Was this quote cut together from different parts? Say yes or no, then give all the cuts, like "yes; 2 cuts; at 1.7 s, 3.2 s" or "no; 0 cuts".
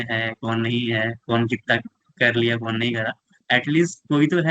yes; 1 cut; at 3.3 s